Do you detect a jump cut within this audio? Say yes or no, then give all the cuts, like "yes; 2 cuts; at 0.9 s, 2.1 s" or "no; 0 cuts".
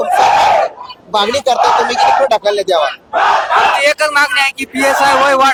no; 0 cuts